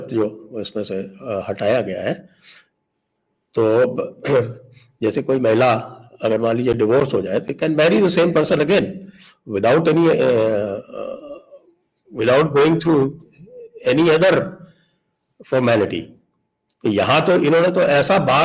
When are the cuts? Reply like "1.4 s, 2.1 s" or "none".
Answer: none